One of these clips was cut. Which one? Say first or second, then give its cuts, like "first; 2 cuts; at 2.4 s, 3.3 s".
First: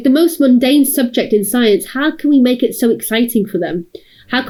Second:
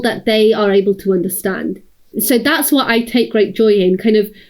second; 1 cut; at 2.1 s